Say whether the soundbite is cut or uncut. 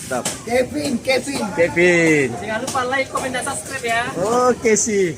uncut